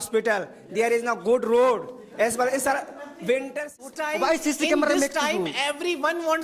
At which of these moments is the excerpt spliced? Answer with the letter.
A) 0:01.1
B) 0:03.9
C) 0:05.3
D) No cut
B